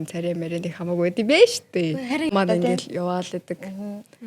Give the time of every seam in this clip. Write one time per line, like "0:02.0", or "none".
0:02.3